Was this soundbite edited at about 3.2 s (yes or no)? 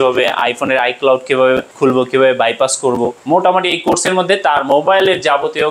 yes